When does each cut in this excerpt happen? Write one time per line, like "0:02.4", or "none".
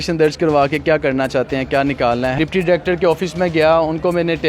0:02.3